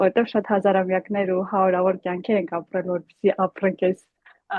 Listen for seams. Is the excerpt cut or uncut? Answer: uncut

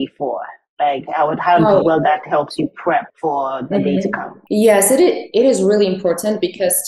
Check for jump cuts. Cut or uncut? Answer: cut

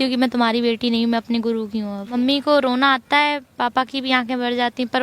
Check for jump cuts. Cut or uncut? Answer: cut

